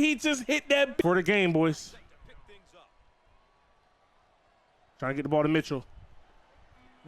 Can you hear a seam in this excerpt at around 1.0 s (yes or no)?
yes